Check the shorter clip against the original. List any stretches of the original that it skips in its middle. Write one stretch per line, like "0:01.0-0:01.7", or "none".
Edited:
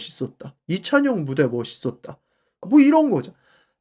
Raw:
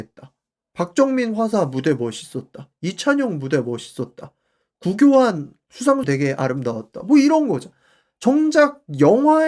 0:04.7-0:06.9

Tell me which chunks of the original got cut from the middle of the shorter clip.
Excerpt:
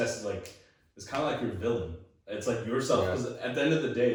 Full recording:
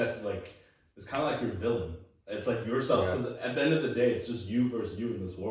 none

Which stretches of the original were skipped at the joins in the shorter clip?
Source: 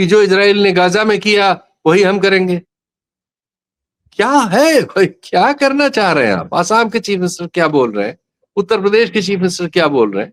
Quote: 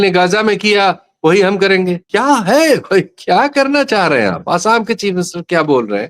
0:02.6-0:04.1

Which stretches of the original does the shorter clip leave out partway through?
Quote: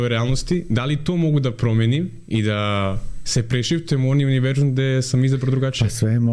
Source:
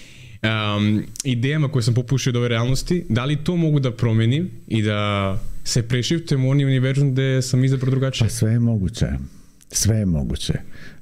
none

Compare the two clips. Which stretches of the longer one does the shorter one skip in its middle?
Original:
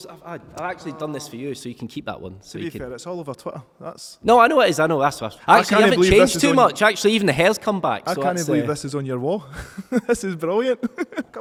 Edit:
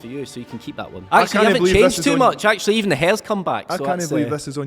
0:02.2-0:05.3

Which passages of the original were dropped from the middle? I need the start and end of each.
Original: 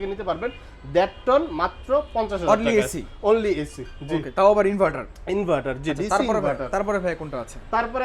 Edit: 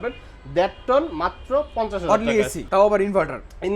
0:03.0-0:04.3

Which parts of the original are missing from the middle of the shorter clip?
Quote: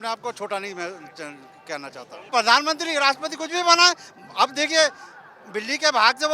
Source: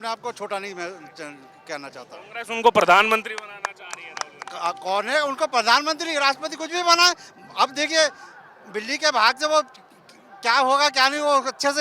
0:02.3-0:05.5

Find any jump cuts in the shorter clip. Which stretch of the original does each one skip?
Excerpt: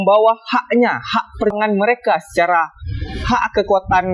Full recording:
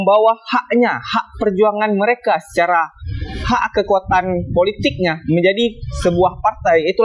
0:01.5-0:01.7

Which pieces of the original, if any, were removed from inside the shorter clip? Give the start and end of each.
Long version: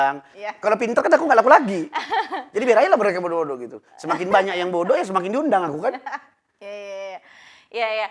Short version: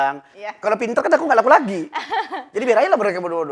none

